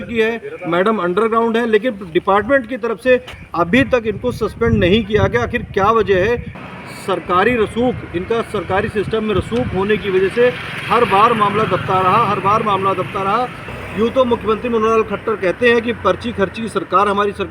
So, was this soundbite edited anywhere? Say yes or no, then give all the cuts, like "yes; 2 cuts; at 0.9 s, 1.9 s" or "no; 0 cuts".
yes; 2 cuts; at 6.6 s, 13.7 s